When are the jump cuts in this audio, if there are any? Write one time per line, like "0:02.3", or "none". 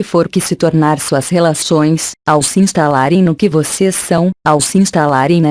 0:01.0